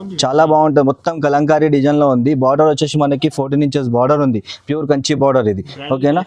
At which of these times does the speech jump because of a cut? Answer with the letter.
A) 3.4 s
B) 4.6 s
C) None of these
C